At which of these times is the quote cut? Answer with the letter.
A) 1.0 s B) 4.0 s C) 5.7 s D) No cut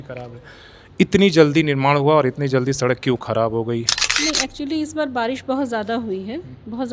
B